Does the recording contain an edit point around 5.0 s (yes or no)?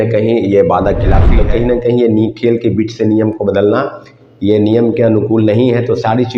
no